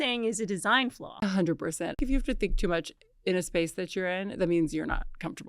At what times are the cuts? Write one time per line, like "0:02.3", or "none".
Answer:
0:01.1
0:02.0